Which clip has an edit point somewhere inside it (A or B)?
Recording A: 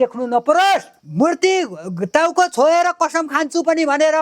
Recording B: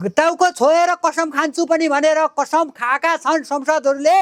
A